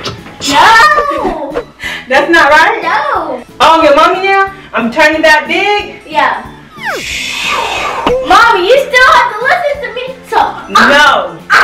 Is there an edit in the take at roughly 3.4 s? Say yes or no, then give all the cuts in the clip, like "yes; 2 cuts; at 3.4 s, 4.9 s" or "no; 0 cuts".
yes; 1 cut; at 3.4 s